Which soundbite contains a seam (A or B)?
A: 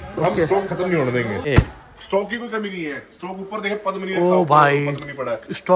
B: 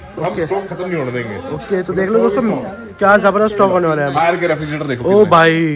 A